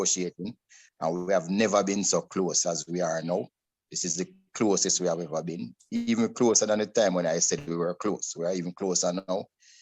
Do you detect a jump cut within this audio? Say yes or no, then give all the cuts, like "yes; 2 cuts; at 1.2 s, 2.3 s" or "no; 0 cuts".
no; 0 cuts